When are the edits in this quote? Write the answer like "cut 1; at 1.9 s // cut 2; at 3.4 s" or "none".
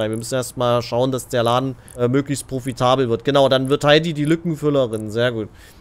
cut 1; at 1.8 s